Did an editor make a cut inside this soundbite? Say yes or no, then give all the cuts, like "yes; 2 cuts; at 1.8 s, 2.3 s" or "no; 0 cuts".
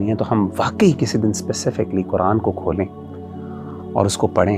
no; 0 cuts